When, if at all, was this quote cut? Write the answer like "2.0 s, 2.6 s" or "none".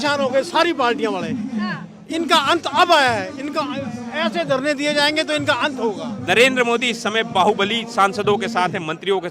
6.2 s